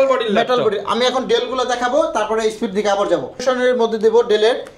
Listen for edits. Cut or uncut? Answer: cut